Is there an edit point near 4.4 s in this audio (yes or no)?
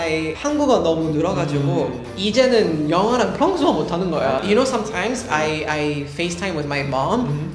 yes